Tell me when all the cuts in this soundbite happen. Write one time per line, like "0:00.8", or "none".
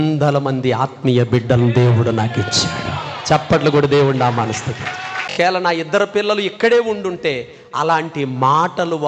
0:05.3